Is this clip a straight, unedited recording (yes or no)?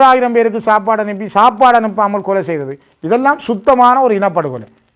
yes